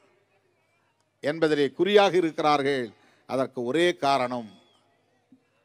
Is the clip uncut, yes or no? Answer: yes